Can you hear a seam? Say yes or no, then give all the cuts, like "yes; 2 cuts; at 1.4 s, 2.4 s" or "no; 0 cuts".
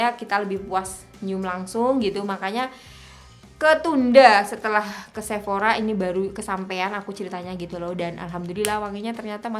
no; 0 cuts